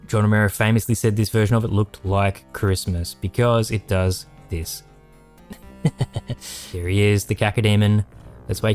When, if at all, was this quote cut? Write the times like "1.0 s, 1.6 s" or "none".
6.5 s